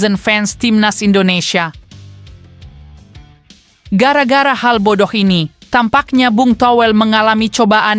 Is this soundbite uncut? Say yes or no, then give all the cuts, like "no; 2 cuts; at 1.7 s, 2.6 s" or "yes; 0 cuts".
no; 2 cuts; at 2.0 s, 3.8 s